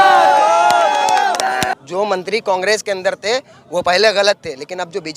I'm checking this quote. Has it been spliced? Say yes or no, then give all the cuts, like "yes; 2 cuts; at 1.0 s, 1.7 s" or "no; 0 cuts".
yes; 1 cut; at 1.7 s